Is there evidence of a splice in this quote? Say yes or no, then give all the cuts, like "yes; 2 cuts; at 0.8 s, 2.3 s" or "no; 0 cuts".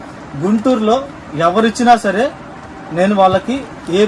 no; 0 cuts